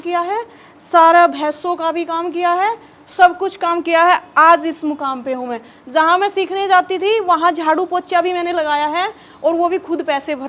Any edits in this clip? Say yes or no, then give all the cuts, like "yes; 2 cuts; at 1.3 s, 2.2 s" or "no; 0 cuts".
no; 0 cuts